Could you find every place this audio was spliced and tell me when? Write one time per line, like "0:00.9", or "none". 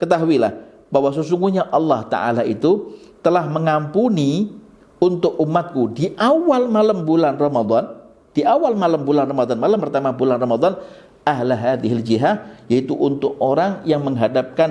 none